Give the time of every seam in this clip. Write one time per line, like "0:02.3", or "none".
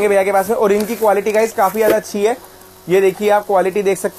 none